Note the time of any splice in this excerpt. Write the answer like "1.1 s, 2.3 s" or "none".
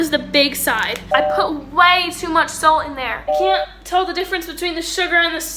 1.1 s, 3.2 s

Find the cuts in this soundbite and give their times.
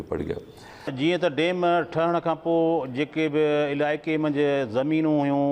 0.9 s

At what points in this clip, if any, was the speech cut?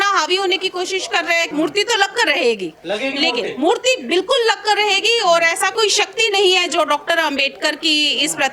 1.5 s

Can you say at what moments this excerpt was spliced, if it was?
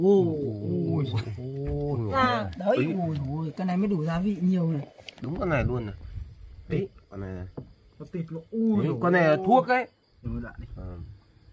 2.1 s, 5.1 s, 10.1 s

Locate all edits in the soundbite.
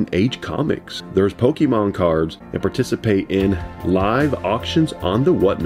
0.9 s, 2.4 s

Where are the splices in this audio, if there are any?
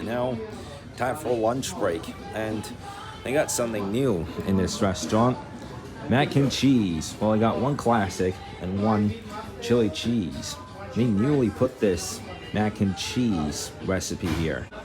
none

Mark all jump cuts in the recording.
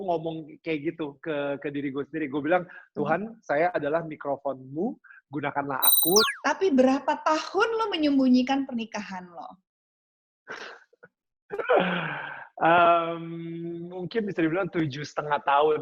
6.3 s

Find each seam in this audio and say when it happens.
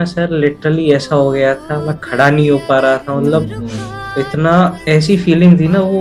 none

